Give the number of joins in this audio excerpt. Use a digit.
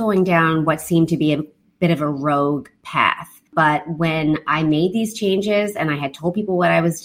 1